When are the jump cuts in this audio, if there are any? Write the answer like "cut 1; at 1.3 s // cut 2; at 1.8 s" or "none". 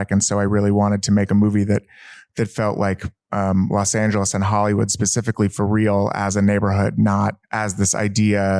cut 1; at 7.4 s